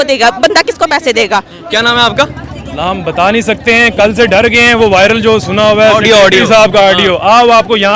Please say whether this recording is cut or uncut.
cut